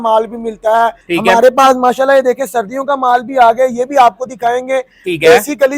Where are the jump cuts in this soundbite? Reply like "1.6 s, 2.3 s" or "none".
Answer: 1.0 s